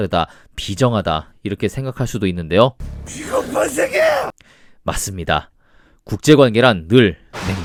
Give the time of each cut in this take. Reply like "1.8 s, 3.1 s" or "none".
none